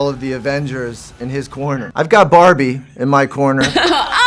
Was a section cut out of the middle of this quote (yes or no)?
yes